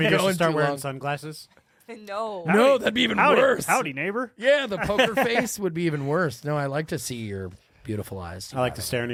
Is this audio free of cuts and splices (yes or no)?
yes